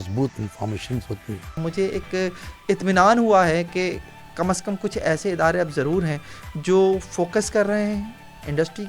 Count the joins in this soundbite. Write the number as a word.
one